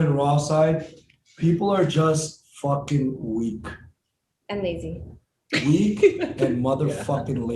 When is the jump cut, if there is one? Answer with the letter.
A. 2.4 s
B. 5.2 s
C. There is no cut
C